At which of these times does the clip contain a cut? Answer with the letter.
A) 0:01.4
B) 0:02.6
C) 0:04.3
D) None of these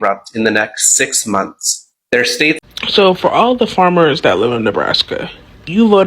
B